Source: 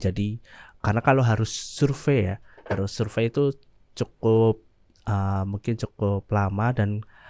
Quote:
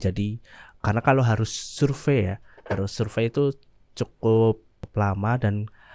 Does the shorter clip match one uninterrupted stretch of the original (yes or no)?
no